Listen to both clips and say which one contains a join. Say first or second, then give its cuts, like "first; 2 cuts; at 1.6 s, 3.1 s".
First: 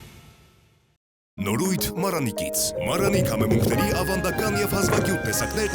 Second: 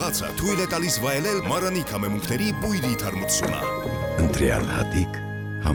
first; 1 cut; at 1.2 s